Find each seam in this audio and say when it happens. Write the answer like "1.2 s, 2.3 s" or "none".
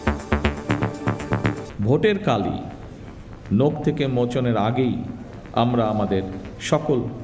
1.7 s